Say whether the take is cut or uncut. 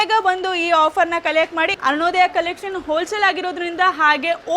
cut